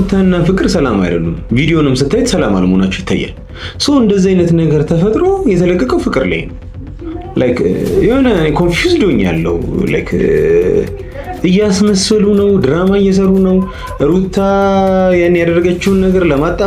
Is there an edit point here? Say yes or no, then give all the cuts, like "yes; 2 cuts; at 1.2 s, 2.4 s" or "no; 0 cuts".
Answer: no; 0 cuts